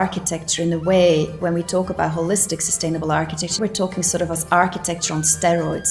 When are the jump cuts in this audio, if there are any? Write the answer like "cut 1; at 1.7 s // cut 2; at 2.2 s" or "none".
cut 1; at 1.3 s // cut 2; at 3.6 s